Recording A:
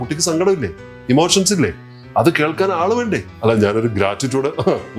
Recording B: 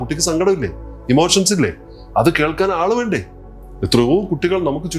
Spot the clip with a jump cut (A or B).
A